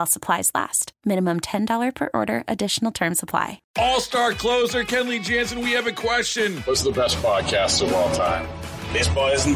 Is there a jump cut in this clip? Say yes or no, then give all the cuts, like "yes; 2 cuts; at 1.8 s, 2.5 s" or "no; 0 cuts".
yes; 1 cut; at 3.6 s